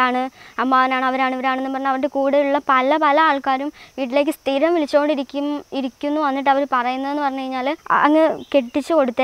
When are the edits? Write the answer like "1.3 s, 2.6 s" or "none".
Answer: 7.8 s